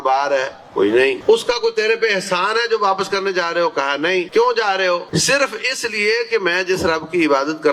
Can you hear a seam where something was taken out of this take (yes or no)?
yes